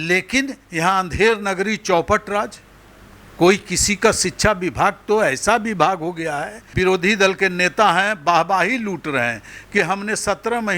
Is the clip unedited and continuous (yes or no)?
no